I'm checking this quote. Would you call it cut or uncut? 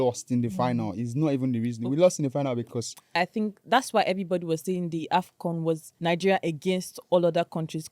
cut